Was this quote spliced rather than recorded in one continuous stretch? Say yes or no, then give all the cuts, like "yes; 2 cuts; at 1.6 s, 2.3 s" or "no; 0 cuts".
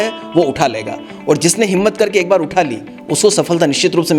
no; 0 cuts